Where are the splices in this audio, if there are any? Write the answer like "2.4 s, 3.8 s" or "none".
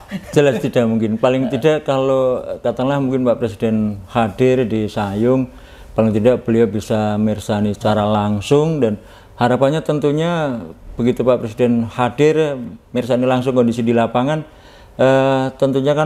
none

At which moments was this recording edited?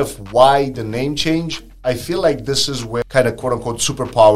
3.0 s

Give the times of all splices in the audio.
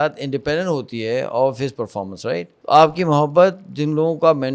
2.5 s

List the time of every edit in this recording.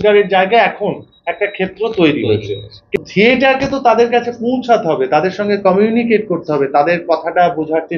3.0 s

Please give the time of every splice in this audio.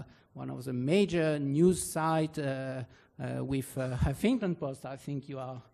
1.4 s

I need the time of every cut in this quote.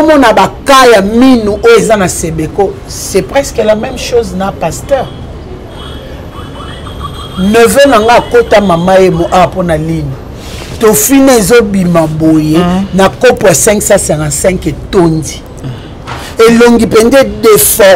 none

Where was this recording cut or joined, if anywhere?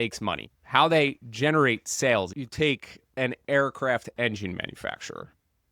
2.4 s

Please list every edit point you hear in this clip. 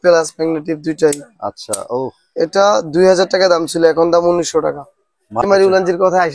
5.5 s

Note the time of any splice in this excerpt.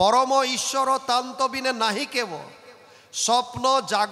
none

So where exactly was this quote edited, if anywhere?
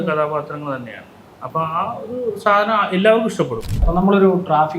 3.9 s

